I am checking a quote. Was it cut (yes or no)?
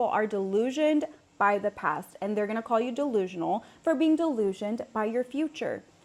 no